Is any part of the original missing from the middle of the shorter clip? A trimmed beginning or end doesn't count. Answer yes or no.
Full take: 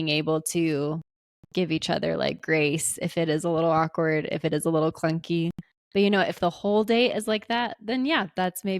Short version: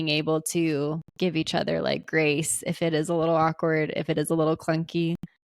yes